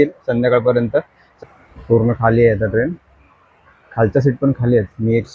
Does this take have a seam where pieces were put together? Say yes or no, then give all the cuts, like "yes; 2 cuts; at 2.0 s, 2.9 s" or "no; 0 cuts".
yes; 1 cut; at 1.2 s